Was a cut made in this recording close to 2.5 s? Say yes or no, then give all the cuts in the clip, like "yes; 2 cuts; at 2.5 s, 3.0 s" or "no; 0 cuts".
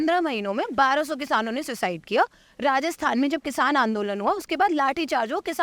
no; 0 cuts